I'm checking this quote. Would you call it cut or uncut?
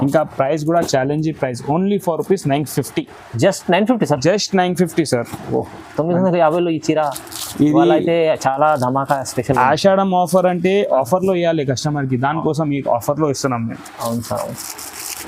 uncut